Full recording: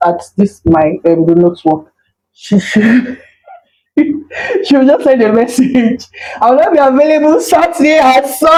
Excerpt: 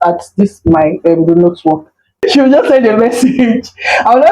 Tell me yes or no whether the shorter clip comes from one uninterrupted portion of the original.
no